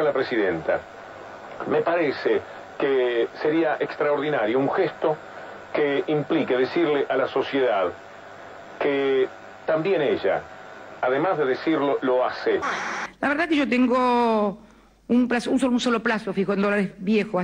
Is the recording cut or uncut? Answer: uncut